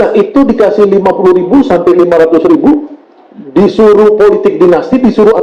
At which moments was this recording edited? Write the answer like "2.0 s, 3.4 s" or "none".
none